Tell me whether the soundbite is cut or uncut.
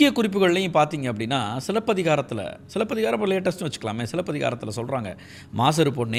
uncut